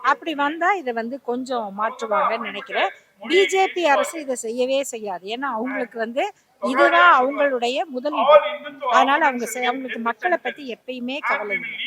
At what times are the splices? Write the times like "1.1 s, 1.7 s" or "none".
none